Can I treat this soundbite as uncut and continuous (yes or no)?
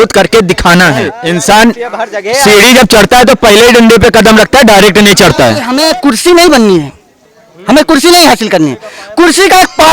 no